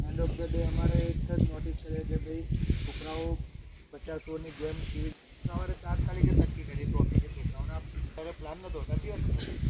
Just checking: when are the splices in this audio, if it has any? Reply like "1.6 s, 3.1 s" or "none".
5.5 s, 8.1 s